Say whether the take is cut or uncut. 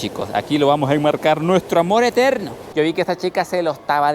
cut